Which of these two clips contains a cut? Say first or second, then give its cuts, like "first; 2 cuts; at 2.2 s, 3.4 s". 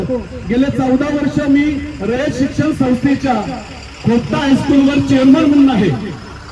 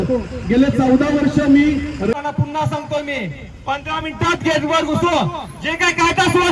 second; 1 cut; at 2.1 s